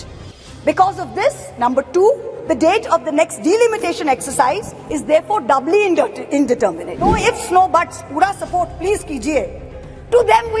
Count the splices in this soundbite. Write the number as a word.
one